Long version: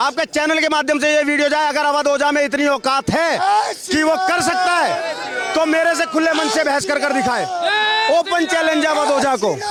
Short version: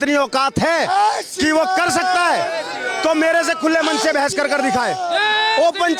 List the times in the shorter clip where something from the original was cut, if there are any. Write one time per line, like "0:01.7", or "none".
none